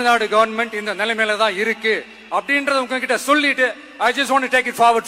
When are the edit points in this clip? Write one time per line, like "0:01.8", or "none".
none